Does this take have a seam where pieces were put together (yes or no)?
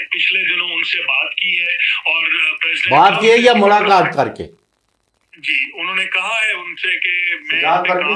no